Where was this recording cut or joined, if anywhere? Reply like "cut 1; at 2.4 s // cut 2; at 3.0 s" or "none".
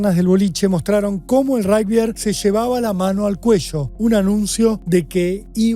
cut 1; at 2.2 s // cut 2; at 3.9 s // cut 3; at 4.8 s